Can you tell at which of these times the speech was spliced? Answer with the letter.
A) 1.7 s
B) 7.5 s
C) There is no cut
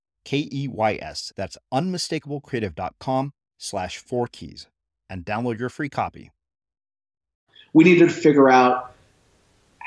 B